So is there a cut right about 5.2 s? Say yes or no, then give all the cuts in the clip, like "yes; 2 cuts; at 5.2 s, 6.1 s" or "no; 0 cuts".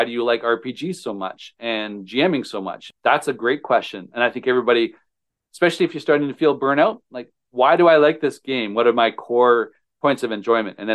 no; 2 cuts; at 2.8 s, 9.8 s